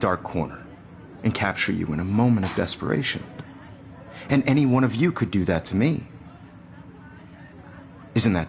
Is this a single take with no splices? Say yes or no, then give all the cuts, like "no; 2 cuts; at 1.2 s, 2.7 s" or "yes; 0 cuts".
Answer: yes; 0 cuts